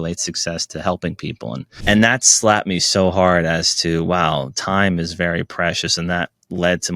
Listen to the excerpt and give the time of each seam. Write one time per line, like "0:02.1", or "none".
0:01.7